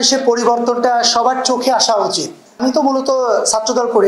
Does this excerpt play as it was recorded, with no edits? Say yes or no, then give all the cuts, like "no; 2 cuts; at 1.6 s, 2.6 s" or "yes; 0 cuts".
no; 1 cut; at 2.4 s